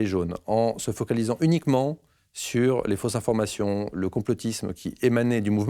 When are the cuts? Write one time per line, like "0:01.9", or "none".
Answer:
none

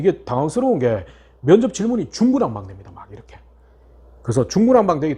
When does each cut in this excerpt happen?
none

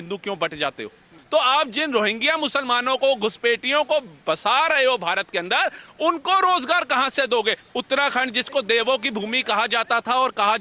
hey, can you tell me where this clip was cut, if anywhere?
0:01.1
0:07.6

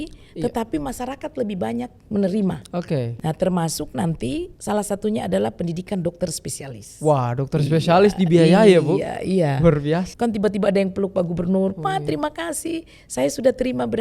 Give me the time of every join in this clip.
0:03.1
0:04.5
0:10.1

